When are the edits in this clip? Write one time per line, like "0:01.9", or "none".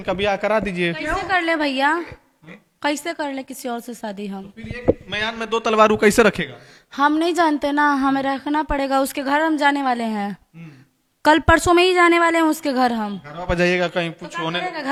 none